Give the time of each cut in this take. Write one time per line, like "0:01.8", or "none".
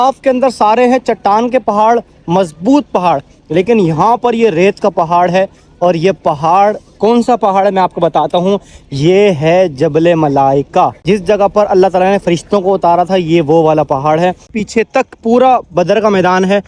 0:11.0
0:14.4